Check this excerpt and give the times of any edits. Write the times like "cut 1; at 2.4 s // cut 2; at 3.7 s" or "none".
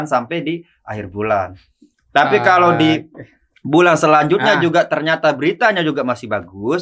none